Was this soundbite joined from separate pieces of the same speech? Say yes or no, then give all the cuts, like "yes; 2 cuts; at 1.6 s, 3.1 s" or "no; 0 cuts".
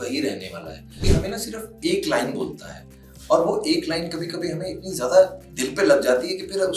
yes; 1 cut; at 1.1 s